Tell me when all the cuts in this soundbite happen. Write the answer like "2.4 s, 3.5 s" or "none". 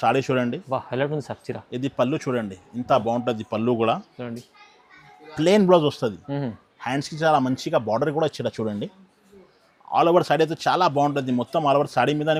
none